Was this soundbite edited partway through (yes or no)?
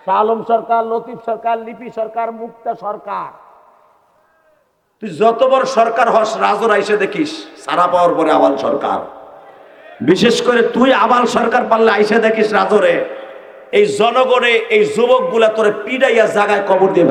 no